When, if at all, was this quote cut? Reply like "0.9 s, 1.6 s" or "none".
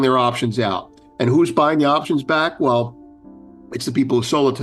none